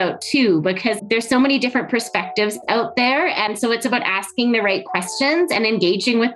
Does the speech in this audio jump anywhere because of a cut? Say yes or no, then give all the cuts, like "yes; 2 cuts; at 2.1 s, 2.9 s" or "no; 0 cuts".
yes; 2 cuts; at 1.0 s, 3.5 s